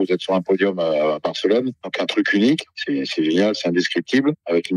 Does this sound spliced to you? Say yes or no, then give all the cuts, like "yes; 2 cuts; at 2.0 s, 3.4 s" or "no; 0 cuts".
yes; 1 cut; at 2.8 s